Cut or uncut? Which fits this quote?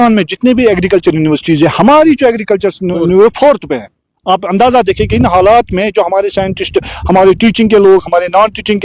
uncut